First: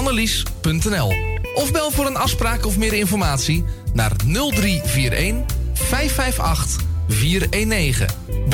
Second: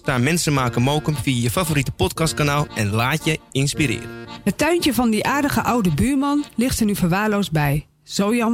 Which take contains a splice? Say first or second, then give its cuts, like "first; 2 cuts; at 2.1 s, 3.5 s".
second; 1 cut; at 4.2 s